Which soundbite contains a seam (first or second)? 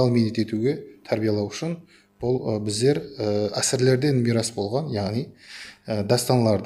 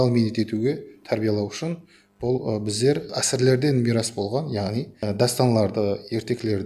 second